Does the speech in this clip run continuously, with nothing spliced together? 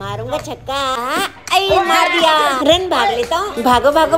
no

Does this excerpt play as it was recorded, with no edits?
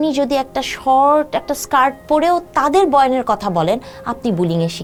yes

